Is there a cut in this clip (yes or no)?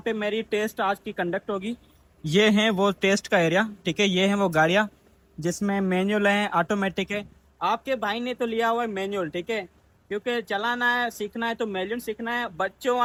no